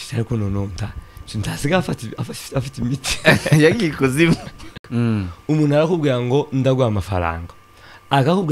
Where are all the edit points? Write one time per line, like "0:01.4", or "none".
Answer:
0:04.6